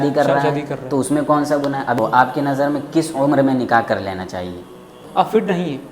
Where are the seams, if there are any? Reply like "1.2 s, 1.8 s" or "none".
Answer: 2.0 s, 5.0 s

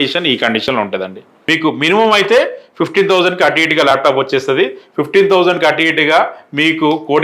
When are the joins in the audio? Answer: 1.3 s

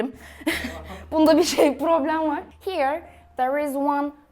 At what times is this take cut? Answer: none

